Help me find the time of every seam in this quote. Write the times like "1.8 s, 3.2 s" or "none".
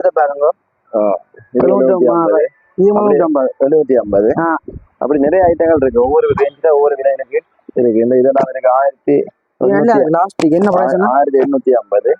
none